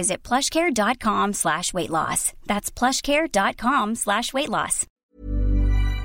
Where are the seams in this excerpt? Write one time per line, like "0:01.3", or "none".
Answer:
0:04.9